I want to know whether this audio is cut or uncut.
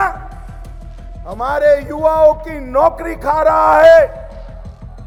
uncut